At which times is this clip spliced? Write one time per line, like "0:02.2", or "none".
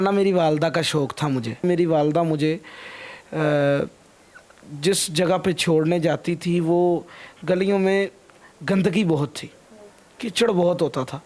0:01.6